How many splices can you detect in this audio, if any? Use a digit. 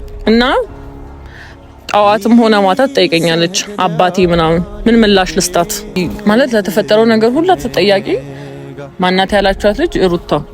1